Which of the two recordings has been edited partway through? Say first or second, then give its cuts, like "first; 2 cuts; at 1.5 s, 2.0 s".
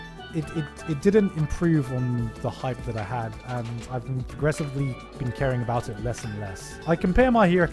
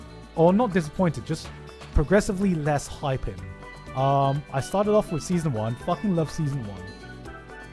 first; 1 cut; at 6.7 s